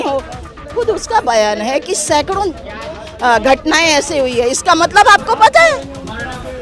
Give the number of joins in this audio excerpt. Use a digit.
0